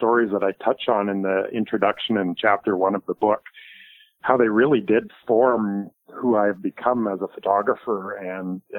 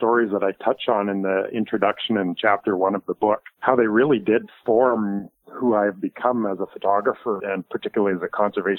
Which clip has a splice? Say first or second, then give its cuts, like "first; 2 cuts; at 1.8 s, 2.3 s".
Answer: second; 2 cuts; at 3.5 s, 7.4 s